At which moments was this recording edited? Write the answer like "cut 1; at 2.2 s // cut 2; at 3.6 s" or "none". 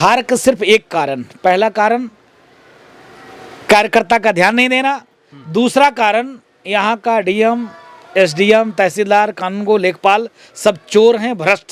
none